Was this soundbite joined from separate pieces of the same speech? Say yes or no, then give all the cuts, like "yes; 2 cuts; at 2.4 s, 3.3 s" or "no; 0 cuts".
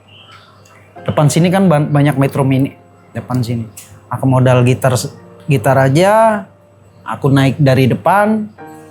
no; 0 cuts